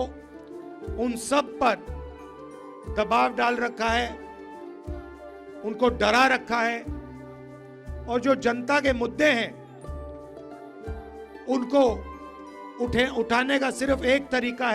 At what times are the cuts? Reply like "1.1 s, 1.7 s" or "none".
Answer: 9.5 s, 10.9 s